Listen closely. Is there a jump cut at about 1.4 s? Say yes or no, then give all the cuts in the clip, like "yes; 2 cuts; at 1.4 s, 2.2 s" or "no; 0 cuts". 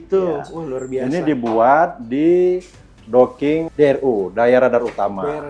no; 1 cut; at 3.6 s